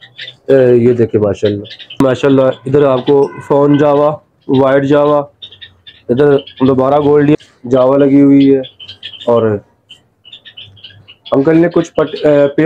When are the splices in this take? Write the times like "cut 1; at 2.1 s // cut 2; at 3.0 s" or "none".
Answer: cut 1; at 2.0 s // cut 2; at 7.4 s

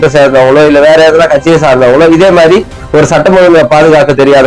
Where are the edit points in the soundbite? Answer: cut 1; at 2.8 s

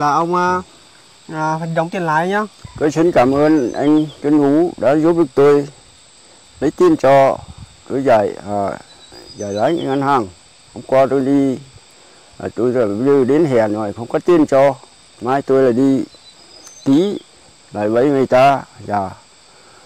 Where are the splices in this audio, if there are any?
cut 1; at 2.6 s

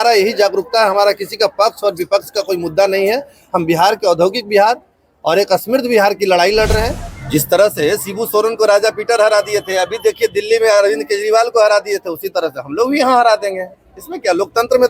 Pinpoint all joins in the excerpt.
cut 1; at 7.0 s

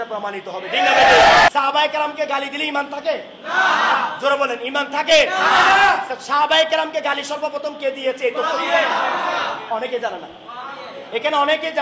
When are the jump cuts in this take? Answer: cut 1; at 1.5 s

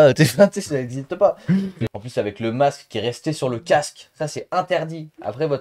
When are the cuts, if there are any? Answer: cut 1; at 1.8 s

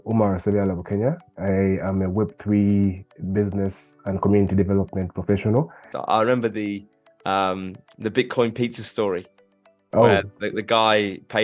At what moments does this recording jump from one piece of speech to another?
cut 1; at 5.9 s

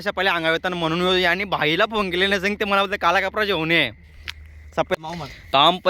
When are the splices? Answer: cut 1; at 4.9 s

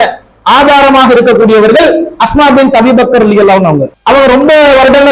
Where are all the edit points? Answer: cut 1; at 3.9 s

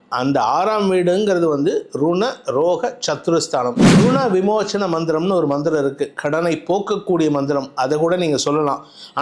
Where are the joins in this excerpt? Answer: cut 1; at 4.0 s

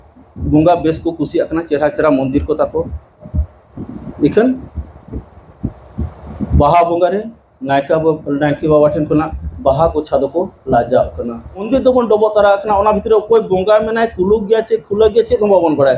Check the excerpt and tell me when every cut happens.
cut 1; at 11.7 s

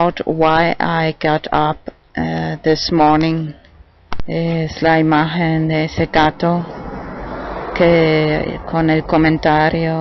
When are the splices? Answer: cut 1; at 2.3 s

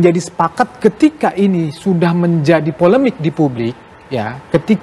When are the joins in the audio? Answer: none

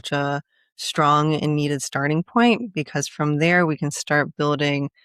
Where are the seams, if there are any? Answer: none

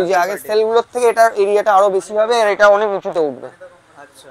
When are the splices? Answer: none

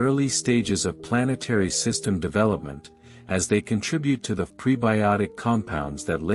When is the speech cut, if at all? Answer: cut 1; at 4.5 s

